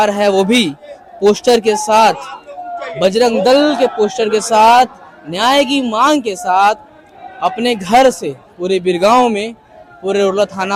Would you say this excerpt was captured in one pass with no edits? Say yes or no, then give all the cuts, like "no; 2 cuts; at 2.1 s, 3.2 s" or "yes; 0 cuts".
yes; 0 cuts